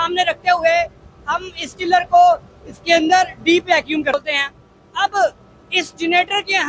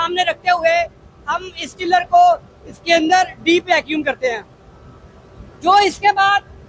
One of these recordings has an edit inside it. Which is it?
first; 1 cut; at 4.1 s

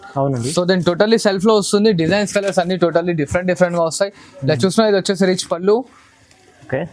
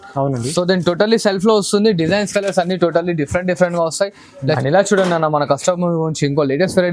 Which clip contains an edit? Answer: second; 1 cut; at 4.6 s

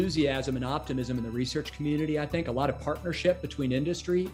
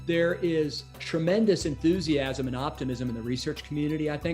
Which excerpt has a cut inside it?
second; 1 cut; at 0.9 s

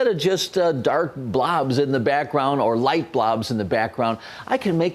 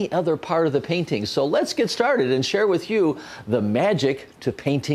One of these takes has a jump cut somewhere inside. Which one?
second; 1 cut; at 1.6 s

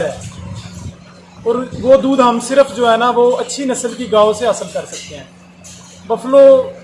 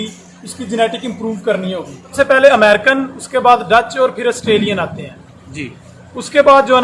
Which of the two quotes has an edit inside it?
second; 1 cut; at 2.1 s

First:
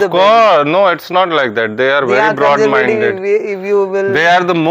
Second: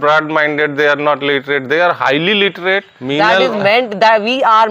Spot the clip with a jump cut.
second; 1 cut; at 3.0 s

